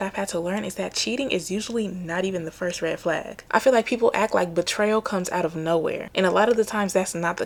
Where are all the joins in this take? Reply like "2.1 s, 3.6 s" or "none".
none

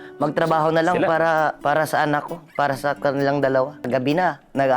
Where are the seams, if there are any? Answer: 1.6 s, 3.9 s

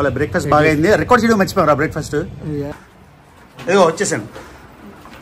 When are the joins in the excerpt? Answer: 2.7 s

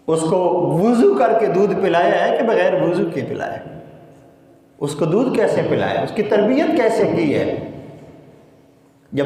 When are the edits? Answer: none

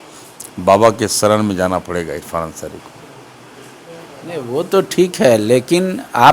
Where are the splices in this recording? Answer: none

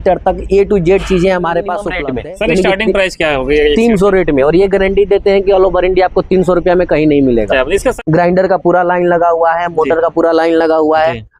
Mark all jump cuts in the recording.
1.9 s, 8.0 s

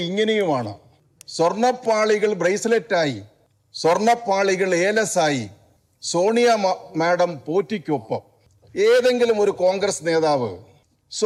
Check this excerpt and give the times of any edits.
none

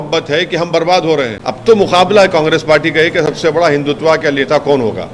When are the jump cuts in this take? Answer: 1.4 s

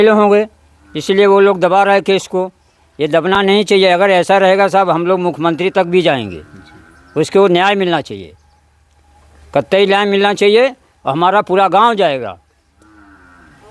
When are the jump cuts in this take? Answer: none

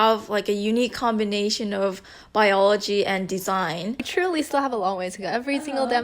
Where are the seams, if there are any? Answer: 4.1 s

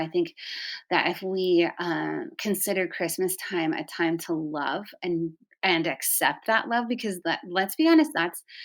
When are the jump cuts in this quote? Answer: none

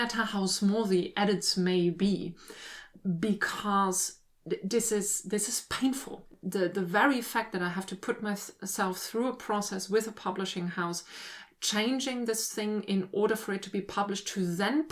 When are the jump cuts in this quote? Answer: 6.3 s

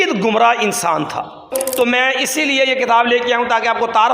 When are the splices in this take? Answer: 1.5 s

